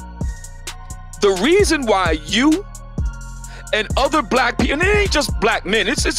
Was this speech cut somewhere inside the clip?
yes; 1 cut; at 1.1 s

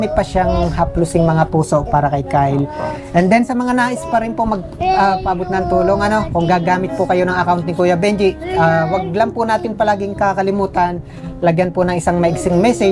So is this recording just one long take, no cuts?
yes; 0 cuts

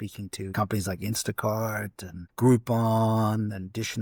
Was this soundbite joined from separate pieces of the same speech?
no; 0 cuts

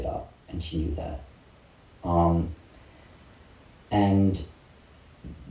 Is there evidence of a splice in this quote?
no; 0 cuts

